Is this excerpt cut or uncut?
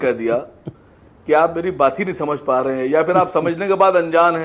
uncut